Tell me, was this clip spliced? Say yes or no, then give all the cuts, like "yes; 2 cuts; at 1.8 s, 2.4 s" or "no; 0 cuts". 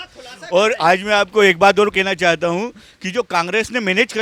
no; 0 cuts